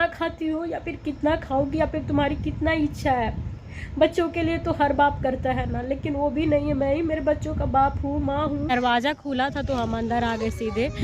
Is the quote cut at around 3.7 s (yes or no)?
no